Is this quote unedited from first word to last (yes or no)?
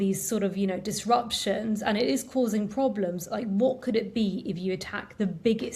yes